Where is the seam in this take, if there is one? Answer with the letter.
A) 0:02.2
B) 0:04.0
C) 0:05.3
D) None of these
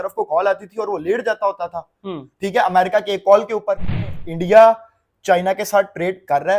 B